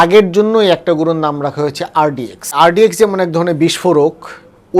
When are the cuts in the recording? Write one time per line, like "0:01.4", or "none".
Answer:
0:02.5